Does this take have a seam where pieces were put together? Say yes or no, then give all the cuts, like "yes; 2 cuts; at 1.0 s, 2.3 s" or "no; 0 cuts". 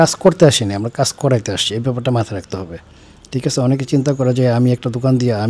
no; 0 cuts